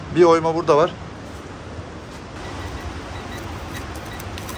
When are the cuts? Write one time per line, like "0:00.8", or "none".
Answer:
0:02.4

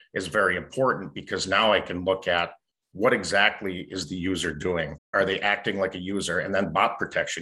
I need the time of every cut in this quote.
0:05.1

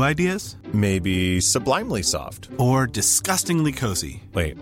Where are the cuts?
none

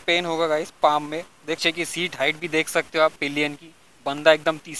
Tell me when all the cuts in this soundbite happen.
0:01.6

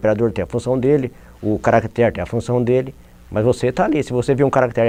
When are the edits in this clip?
none

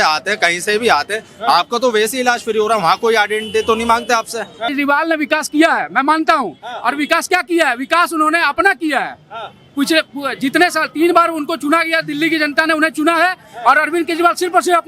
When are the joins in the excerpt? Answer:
0:04.7

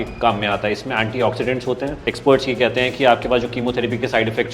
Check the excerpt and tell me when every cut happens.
0:02.0

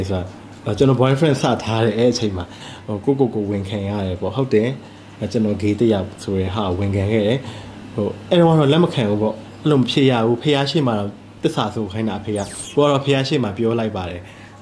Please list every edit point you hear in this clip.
0:02.6
0:12.6

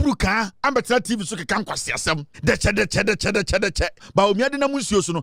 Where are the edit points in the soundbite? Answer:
0:02.3
0:04.0

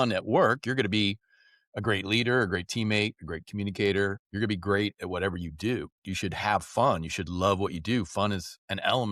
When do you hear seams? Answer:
0:04.2
0:06.0

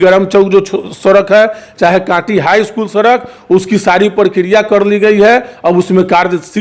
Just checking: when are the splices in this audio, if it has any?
none

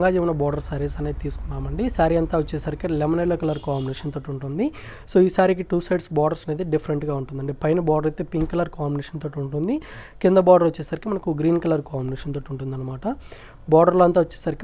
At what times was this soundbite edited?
none

